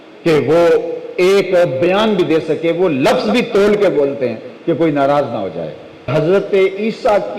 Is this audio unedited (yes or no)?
no